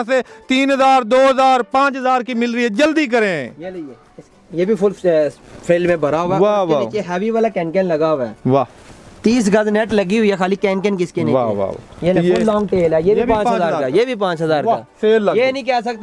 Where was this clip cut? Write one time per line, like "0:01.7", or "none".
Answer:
none